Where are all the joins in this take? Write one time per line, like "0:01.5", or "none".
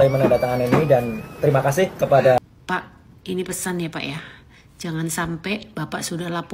0:02.4